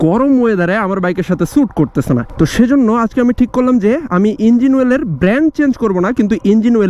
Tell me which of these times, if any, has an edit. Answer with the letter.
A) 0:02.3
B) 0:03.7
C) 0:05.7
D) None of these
A